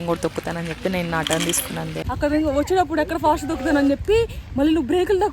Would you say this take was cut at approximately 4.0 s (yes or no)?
no